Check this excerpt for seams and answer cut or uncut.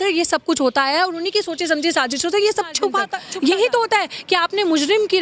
cut